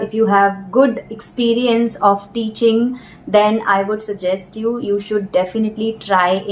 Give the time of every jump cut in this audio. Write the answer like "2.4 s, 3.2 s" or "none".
none